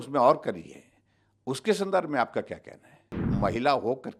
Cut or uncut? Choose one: cut